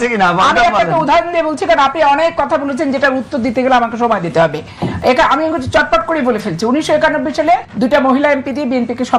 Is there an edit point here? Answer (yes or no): yes